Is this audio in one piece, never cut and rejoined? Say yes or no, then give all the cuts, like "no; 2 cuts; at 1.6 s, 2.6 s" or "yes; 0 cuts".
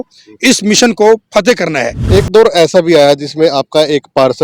no; 1 cut; at 1.9 s